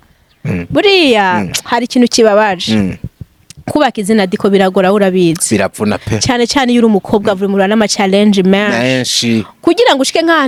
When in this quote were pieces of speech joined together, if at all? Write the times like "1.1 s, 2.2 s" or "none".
none